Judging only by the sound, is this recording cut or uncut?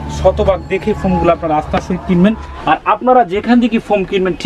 cut